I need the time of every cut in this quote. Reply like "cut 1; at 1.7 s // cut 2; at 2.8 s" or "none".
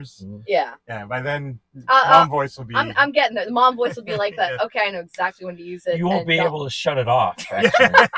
none